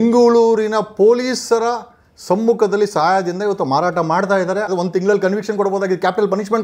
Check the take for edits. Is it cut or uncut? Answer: cut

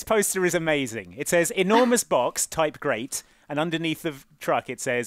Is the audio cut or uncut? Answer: uncut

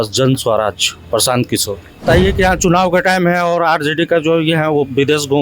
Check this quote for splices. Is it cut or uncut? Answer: cut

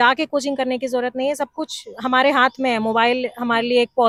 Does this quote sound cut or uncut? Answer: uncut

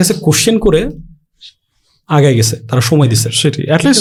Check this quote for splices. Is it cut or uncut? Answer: uncut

